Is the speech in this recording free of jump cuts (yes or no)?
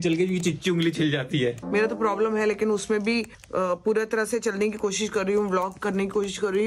no